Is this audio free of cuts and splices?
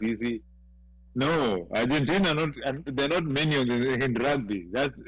yes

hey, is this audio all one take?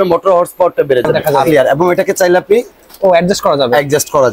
no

